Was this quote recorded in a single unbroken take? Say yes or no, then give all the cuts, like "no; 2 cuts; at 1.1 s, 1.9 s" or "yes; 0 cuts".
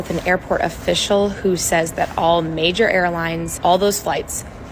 no; 1 cut; at 3.5 s